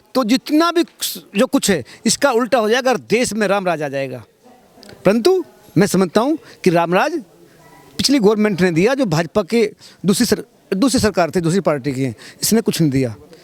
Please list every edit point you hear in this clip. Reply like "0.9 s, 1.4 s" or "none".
none

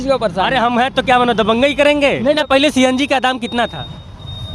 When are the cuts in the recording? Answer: 2.3 s

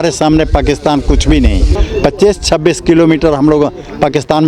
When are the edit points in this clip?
1.7 s

